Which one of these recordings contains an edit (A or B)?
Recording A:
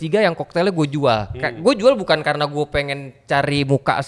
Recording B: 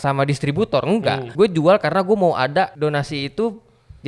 B